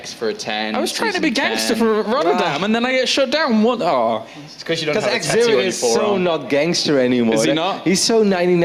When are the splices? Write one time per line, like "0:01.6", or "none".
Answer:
none